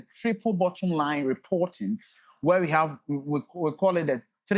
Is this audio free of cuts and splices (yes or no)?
yes